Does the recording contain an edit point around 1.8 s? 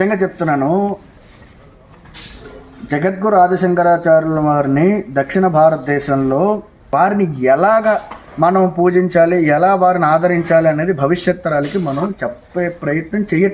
no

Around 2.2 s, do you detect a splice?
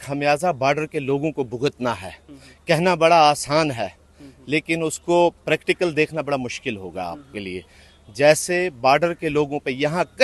no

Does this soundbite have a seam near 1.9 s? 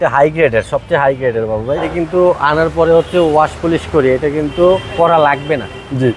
yes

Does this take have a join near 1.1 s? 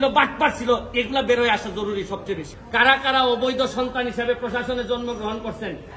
no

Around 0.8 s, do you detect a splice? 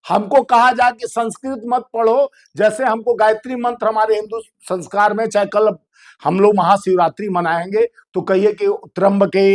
no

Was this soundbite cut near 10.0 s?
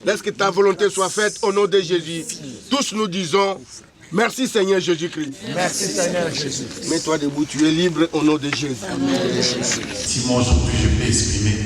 yes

